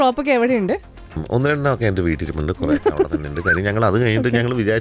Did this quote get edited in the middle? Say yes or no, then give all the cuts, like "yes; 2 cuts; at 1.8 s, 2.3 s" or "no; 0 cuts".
yes; 1 cut; at 1.2 s